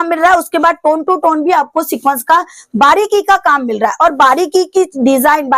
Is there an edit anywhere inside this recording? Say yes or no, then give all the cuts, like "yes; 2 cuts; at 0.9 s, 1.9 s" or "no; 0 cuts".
no; 0 cuts